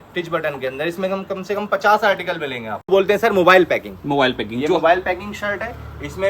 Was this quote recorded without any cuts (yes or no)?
no